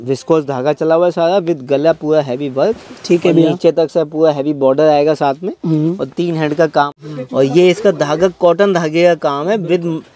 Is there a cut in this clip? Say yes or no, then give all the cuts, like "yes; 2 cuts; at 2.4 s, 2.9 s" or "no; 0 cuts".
yes; 1 cut; at 6.9 s